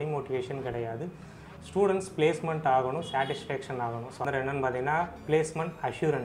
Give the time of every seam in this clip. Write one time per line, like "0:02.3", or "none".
0:04.2